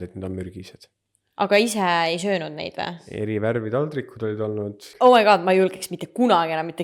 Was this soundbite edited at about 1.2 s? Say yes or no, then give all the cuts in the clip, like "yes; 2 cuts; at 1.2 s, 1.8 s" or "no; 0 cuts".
no; 2 cuts; at 3.0 s, 4.8 s